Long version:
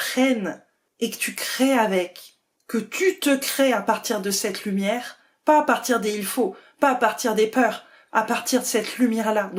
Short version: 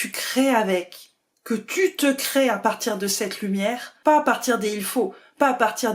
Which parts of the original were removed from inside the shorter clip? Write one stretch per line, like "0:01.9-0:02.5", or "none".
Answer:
0:05.1-0:05.3